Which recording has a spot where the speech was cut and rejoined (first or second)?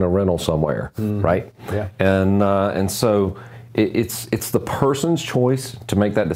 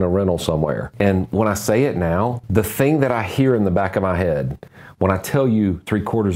second